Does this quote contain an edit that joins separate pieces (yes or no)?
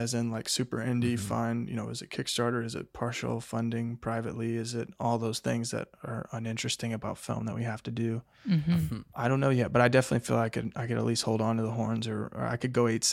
yes